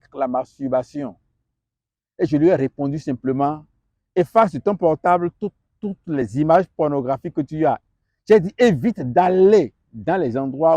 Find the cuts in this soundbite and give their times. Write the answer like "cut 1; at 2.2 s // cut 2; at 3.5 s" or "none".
cut 1; at 7.8 s